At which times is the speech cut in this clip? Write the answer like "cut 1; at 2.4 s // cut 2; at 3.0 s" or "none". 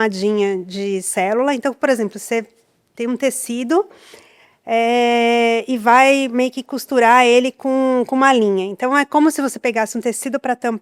none